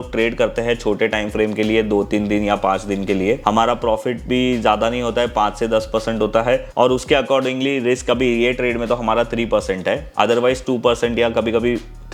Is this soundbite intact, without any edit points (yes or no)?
yes